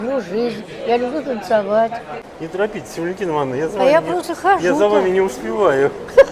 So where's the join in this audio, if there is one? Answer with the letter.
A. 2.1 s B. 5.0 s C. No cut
A